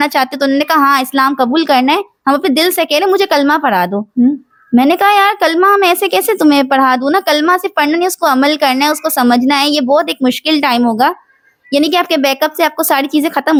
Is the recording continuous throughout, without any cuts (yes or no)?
yes